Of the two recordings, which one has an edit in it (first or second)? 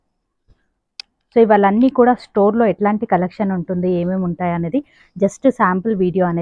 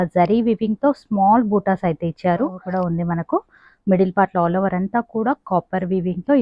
second